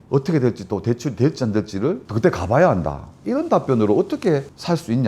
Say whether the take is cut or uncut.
uncut